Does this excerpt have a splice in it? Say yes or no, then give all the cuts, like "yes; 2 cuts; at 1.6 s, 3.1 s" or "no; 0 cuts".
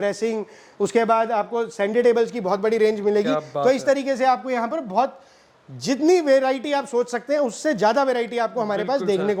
no; 0 cuts